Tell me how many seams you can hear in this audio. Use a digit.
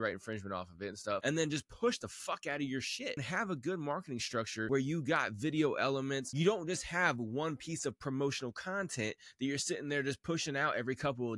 4